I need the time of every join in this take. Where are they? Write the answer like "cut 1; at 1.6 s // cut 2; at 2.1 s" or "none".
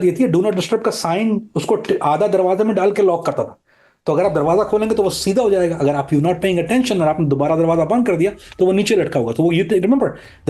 none